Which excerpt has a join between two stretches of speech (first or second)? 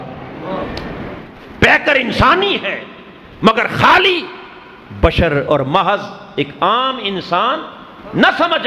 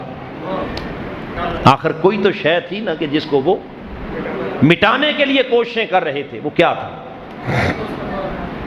first